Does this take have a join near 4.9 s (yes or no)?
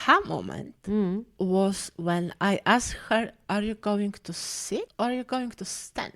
yes